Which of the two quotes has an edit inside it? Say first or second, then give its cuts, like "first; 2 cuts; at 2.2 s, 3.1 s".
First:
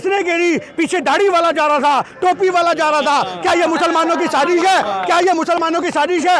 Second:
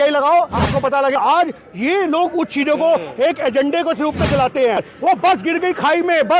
second; 2 cuts; at 1.1 s, 4.8 s